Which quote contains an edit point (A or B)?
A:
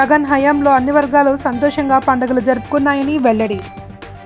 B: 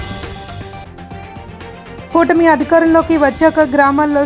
B